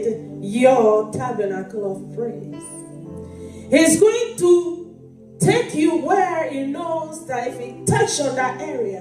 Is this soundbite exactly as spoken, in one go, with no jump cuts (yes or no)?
yes